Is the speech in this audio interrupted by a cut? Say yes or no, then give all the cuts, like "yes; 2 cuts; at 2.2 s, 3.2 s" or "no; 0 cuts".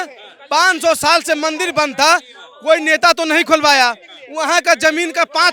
no; 0 cuts